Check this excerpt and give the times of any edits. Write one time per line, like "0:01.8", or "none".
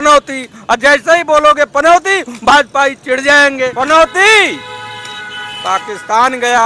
0:03.7